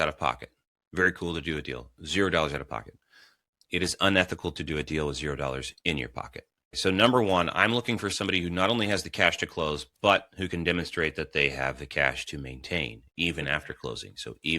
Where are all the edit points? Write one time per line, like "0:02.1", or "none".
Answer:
0:06.8

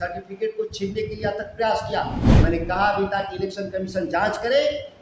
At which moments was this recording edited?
none

